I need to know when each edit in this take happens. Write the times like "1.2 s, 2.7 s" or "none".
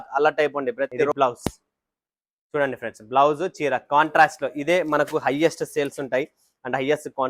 1.1 s